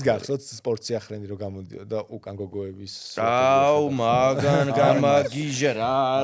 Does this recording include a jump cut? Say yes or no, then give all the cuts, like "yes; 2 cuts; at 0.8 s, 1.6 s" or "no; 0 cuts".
no; 0 cuts